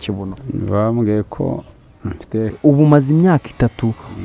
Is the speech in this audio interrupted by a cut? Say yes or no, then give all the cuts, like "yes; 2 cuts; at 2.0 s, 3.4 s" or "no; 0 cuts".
yes; 1 cut; at 2.5 s